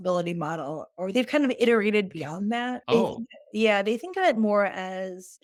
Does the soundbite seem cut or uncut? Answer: uncut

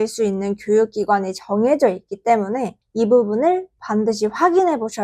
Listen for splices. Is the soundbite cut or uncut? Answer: cut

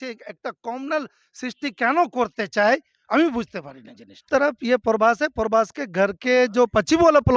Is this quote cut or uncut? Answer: cut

